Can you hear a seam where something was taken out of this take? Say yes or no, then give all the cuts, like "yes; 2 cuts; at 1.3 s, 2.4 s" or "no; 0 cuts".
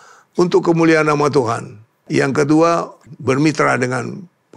yes; 2 cuts; at 2.1 s, 3.0 s